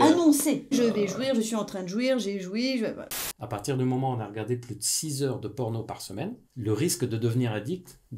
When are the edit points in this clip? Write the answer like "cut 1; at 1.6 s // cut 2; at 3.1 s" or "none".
cut 1; at 0.7 s // cut 2; at 3.1 s